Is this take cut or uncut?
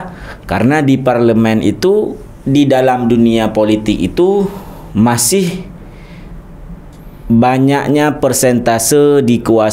uncut